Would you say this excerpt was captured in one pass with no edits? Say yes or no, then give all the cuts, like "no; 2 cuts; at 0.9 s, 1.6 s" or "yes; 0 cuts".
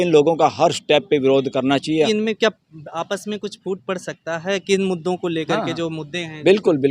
no; 1 cut; at 2.1 s